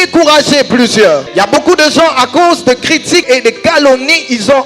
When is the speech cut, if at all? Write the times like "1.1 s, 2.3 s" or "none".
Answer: 1.3 s, 3.2 s